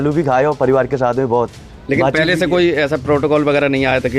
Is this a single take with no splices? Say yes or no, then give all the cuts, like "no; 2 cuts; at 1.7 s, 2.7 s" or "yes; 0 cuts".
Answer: yes; 0 cuts